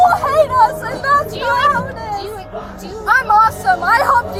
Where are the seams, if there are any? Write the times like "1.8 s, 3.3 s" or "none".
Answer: none